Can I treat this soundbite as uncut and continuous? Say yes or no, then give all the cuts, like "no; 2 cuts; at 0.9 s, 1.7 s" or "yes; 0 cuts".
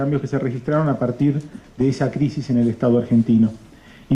yes; 0 cuts